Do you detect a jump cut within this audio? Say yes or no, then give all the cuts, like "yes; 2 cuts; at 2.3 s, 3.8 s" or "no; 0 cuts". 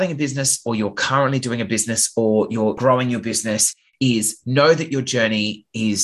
no; 0 cuts